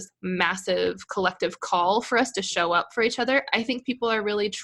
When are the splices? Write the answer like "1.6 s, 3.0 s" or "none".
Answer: none